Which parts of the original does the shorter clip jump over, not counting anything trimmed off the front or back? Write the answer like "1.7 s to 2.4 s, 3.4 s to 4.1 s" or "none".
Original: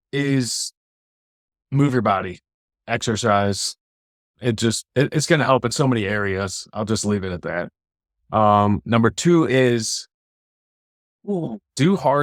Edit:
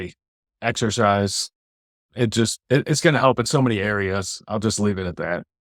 none